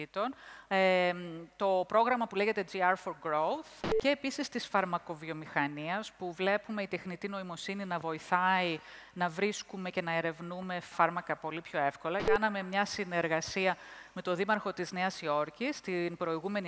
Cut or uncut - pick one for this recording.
cut